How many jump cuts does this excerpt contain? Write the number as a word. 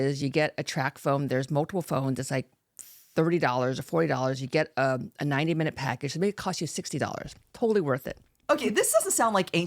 one